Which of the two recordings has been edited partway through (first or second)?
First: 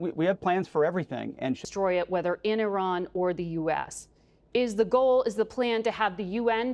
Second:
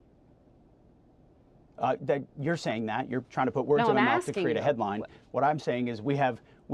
first